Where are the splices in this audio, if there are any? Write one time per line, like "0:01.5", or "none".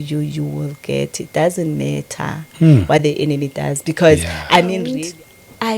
0:04.8